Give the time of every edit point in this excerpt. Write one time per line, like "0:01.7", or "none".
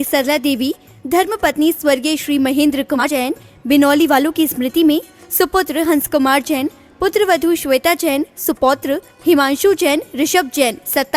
0:03.0